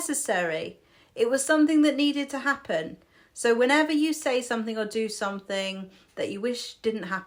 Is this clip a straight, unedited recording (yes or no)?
yes